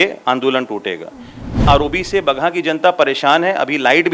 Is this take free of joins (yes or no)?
no